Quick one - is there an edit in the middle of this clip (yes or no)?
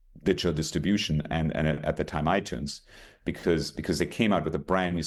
no